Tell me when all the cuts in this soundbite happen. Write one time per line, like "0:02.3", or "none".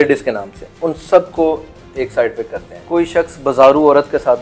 0:02.8